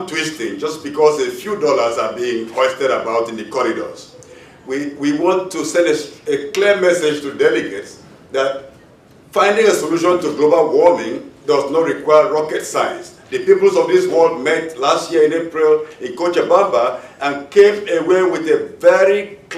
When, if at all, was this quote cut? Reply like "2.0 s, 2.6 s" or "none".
15.3 s